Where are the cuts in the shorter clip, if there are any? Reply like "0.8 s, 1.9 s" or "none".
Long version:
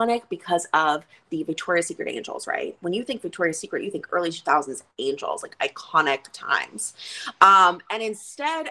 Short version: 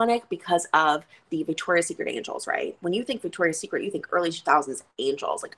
none